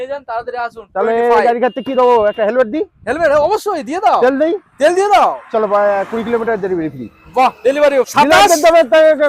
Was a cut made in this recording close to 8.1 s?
yes; 1 cut; at 8.1 s

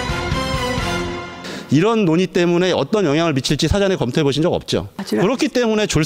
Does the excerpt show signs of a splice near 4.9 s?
yes; 1 cut; at 4.9 s

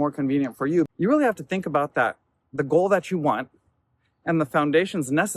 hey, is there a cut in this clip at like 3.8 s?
no; 1 cut; at 0.9 s

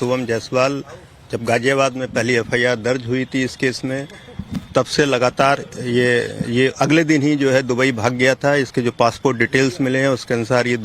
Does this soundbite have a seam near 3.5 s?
yes; 1 cut; at 3.5 s

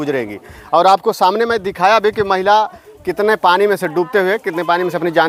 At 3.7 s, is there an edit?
no; 0 cuts

